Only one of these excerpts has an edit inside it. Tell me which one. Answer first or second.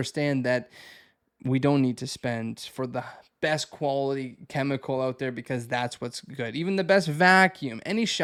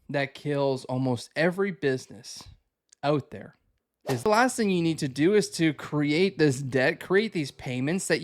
second